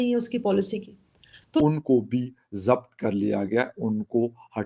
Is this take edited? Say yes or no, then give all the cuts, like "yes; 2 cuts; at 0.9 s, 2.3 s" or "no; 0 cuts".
yes; 1 cut; at 1.6 s